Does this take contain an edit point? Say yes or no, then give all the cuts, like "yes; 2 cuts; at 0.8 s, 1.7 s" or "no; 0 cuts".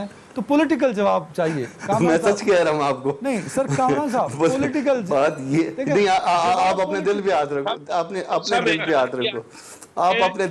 no; 0 cuts